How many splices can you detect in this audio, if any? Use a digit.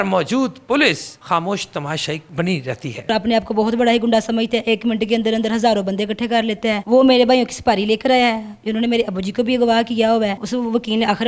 2